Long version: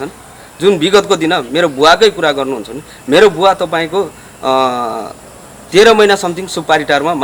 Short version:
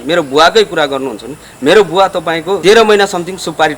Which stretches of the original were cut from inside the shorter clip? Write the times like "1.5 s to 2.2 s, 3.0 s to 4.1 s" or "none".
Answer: 4.1 s to 5.7 s